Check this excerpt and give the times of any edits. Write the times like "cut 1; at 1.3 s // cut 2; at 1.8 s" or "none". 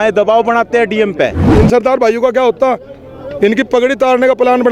cut 1; at 1.4 s